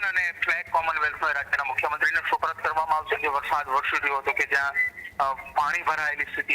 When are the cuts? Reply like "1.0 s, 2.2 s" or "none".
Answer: 3.2 s